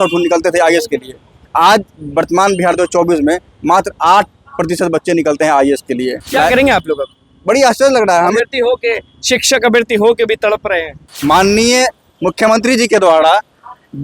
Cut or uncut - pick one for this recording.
cut